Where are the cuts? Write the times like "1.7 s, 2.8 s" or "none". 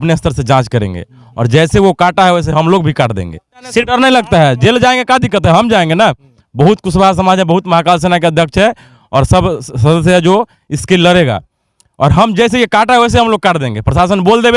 3.5 s